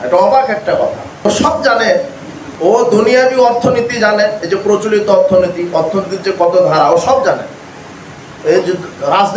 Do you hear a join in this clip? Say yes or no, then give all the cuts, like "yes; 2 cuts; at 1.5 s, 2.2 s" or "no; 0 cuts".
yes; 1 cut; at 1.2 s